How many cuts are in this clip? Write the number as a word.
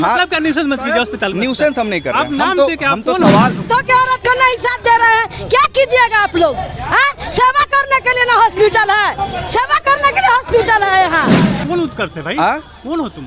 two